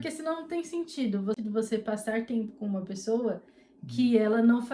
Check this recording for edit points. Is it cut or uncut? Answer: cut